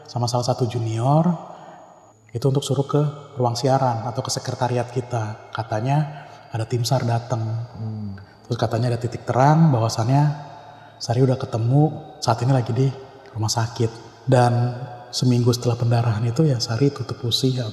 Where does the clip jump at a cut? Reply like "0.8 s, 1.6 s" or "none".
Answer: 12.2 s, 14.1 s